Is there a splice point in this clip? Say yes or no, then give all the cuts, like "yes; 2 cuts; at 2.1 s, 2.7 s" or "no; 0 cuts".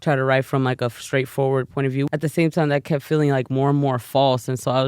yes; 1 cut; at 2.1 s